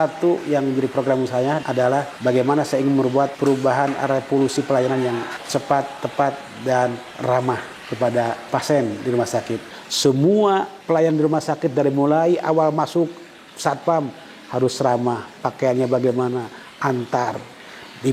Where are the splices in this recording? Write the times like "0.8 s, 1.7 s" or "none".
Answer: 1.9 s, 3.3 s, 5.4 s, 7.4 s, 8.5 s, 9.7 s, 10.7 s